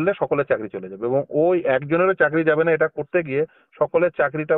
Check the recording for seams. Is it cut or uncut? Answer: uncut